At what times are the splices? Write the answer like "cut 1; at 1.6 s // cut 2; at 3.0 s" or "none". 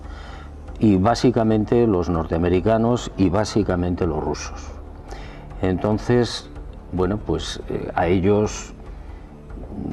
cut 1; at 1.9 s